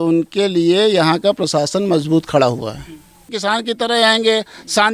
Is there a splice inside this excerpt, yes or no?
yes